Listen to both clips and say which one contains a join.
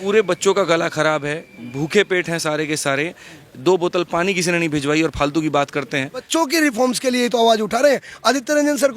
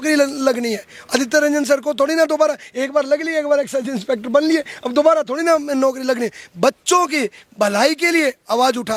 first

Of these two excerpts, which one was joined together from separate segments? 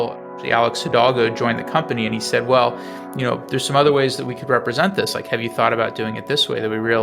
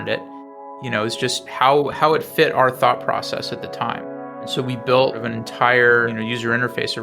second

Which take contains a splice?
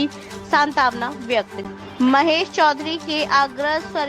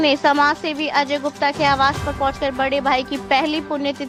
first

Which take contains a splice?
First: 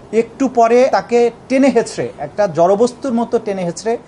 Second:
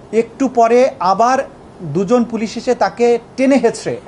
first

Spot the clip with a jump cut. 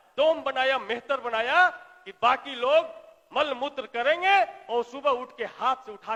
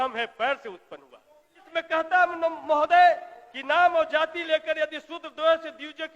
second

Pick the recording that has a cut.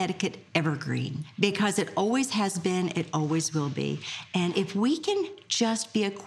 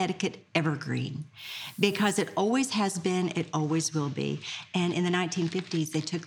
first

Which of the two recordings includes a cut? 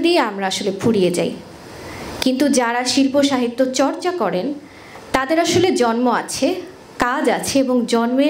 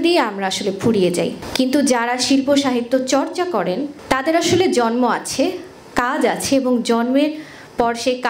second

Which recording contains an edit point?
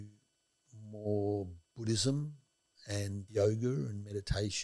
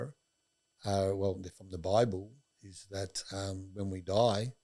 first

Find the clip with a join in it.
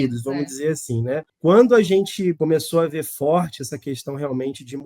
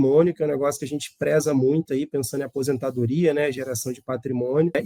first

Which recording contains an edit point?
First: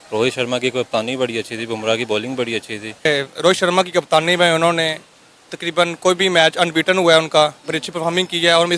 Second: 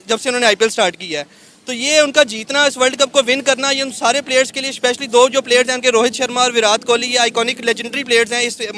first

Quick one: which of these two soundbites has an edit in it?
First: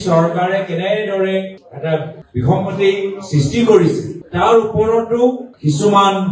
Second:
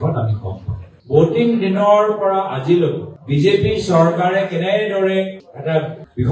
second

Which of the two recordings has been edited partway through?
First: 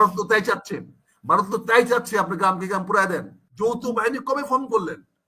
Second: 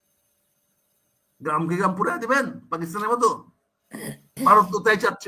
first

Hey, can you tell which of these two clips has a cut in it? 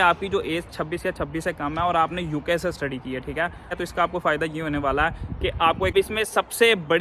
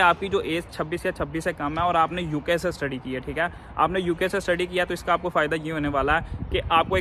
first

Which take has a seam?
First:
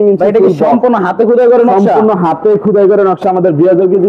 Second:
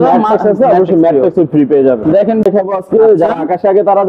second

